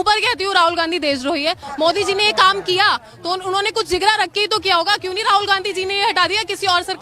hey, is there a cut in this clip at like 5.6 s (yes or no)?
no